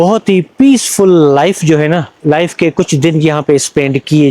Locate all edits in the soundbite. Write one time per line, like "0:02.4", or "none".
0:02.1

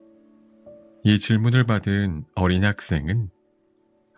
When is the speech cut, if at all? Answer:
0:01.0

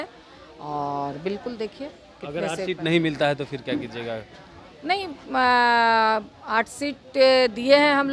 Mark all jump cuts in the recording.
none

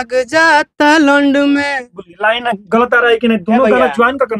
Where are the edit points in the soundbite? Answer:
none

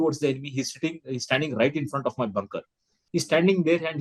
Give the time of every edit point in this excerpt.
0:02.9

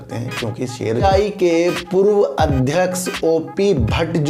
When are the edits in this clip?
0:01.0

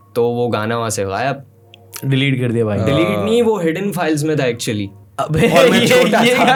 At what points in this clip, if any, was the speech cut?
none

